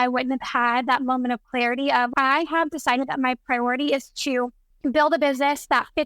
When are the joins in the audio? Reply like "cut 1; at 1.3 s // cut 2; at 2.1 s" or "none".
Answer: cut 1; at 2.1 s // cut 2; at 4.6 s